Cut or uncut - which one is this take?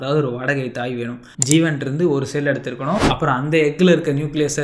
cut